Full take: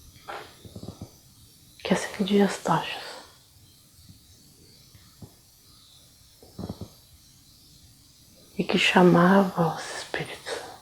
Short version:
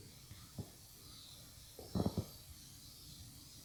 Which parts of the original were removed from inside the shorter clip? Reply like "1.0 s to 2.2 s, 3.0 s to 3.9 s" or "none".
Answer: none